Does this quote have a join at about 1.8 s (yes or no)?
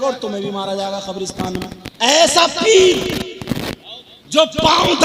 yes